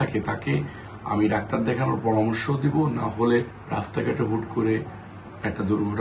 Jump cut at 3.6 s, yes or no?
yes